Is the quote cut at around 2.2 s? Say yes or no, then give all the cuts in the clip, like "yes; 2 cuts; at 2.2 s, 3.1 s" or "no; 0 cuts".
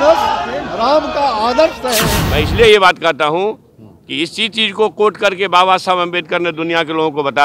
yes; 1 cut; at 2.2 s